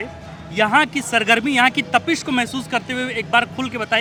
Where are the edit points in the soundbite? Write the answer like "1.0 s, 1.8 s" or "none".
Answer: none